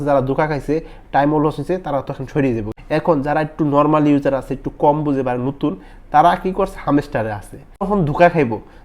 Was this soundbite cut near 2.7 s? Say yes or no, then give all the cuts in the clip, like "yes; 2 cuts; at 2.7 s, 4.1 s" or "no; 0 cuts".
yes; 1 cut; at 2.7 s